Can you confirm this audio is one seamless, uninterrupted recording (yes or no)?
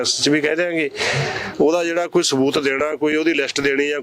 yes